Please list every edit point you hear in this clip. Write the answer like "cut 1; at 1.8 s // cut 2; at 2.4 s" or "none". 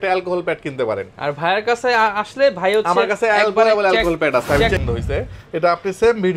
cut 1; at 4.8 s